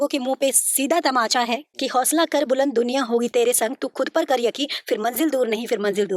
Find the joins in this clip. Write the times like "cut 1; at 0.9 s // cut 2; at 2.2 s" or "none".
cut 1; at 1.7 s